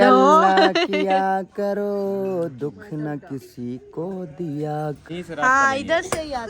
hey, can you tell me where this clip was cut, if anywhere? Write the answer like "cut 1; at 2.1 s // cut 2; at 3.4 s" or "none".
cut 1; at 5.0 s